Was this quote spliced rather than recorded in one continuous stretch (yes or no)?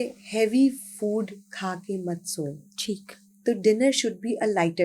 no